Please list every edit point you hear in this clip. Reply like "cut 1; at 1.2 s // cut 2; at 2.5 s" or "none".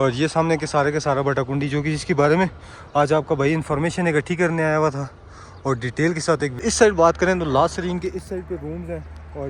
cut 1; at 6.6 s